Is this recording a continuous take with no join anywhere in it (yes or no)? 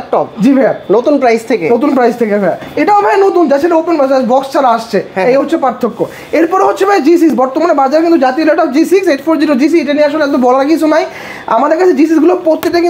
yes